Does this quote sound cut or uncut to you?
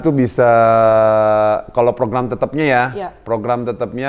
uncut